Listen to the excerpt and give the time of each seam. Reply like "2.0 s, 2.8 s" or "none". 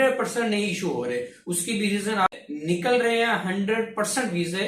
2.3 s